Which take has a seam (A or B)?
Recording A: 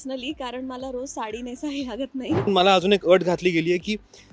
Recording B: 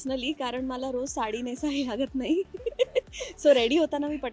A